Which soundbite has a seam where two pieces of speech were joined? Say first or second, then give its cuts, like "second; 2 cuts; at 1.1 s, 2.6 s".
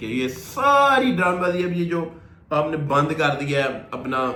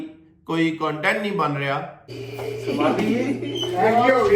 second; 1 cut; at 2.1 s